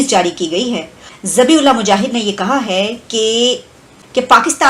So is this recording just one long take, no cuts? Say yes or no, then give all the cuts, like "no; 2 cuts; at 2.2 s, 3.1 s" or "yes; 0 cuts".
yes; 0 cuts